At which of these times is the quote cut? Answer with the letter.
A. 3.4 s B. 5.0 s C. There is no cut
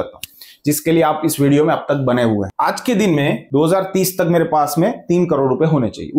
A